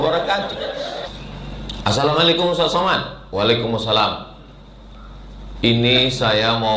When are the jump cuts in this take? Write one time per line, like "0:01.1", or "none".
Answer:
0:01.0